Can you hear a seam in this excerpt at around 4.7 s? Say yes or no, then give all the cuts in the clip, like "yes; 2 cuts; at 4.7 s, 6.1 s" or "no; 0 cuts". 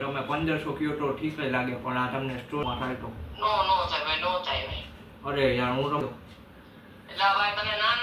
no; 2 cuts; at 2.6 s, 6.0 s